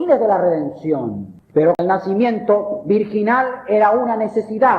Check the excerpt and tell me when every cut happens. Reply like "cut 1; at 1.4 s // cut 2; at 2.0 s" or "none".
cut 1; at 1.8 s